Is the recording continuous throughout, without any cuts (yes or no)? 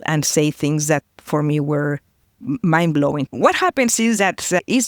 no